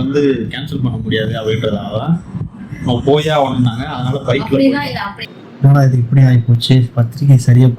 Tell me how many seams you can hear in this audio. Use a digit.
1